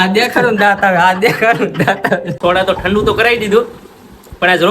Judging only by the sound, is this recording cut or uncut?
cut